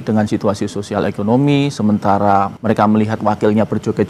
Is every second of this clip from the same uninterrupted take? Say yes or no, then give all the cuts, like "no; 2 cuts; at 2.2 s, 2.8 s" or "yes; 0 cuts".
no; 1 cut; at 2.6 s